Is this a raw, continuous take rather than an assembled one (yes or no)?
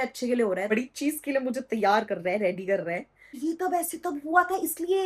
no